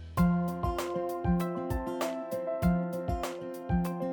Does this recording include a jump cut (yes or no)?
no